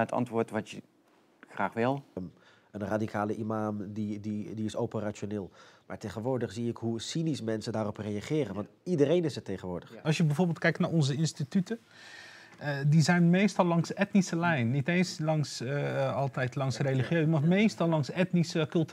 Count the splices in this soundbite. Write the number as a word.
two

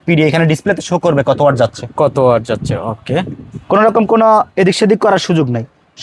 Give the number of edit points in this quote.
zero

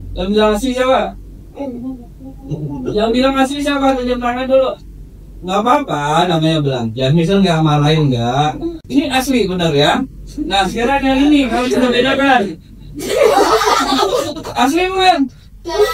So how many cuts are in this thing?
one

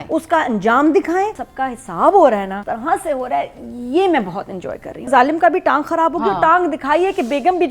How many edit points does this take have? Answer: three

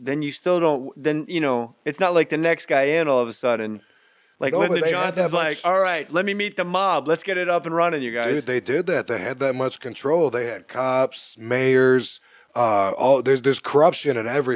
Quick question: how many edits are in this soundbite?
one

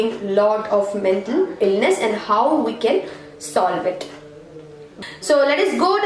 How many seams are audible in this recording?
one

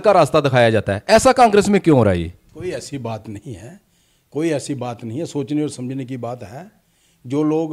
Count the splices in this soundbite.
zero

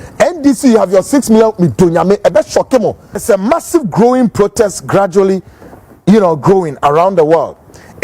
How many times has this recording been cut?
one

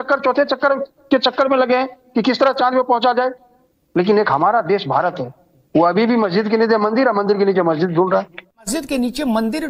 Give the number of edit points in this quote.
one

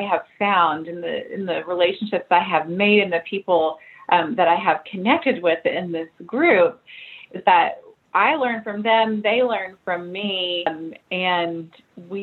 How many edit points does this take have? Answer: zero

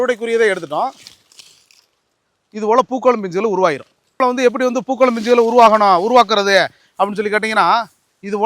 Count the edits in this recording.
one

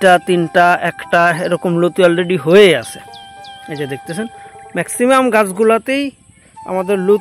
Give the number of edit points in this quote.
zero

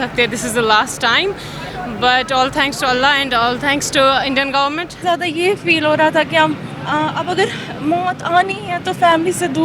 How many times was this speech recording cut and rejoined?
one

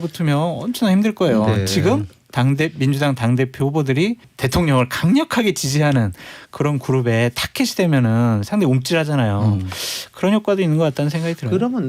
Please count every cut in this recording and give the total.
one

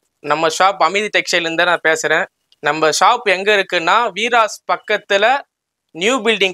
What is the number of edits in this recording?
zero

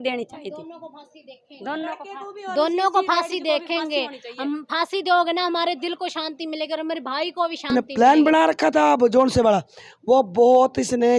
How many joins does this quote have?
one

